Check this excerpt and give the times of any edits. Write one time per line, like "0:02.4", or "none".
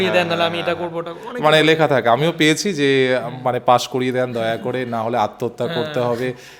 none

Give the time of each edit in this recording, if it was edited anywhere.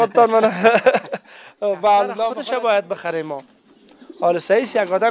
0:02.4

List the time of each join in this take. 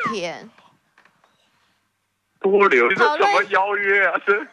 0:02.9

